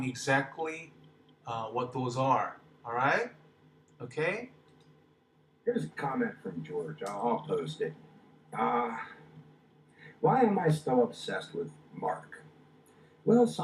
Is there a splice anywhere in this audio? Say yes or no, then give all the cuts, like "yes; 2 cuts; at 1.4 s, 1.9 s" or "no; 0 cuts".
no; 0 cuts